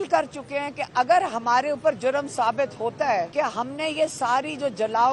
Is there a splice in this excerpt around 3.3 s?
yes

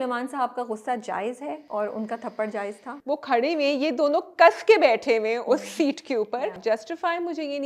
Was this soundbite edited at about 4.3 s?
no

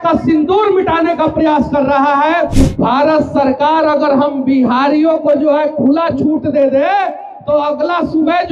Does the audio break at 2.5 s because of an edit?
yes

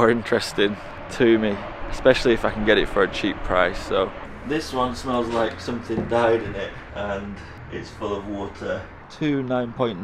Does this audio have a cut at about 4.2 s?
yes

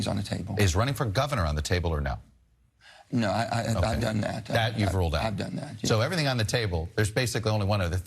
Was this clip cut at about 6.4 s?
no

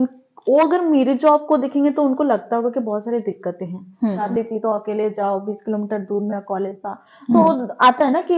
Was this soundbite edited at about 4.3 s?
yes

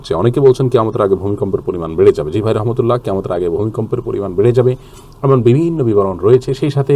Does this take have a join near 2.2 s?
no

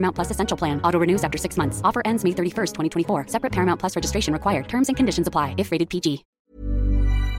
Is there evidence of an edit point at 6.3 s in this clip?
yes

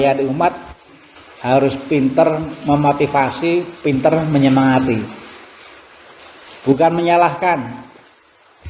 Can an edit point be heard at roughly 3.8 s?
no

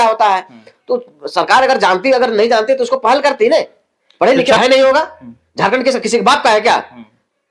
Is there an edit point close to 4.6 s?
yes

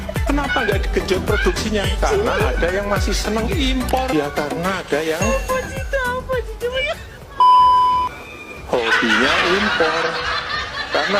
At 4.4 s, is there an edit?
yes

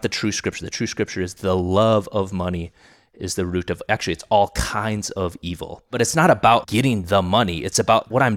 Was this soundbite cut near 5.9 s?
yes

